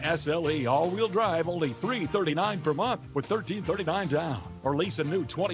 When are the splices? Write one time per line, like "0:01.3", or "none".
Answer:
none